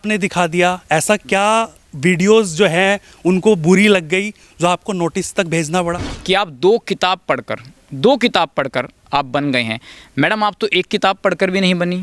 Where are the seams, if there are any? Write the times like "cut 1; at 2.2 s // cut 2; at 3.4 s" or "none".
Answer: cut 1; at 6.1 s